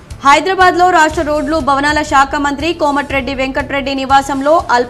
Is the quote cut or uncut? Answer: uncut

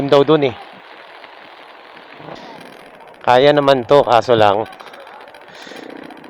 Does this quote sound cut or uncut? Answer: cut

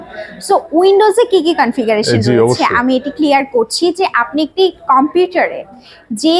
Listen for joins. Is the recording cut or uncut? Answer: uncut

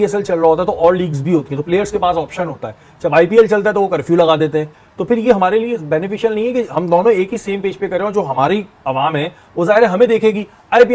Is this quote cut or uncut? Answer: cut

